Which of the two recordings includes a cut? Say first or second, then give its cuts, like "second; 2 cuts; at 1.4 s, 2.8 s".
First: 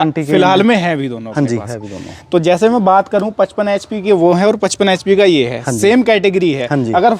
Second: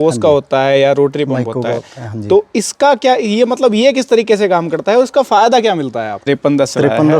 second; 1 cut; at 6.2 s